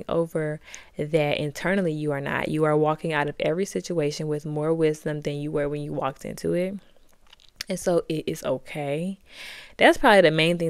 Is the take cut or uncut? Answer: uncut